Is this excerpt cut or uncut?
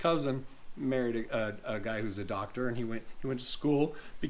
uncut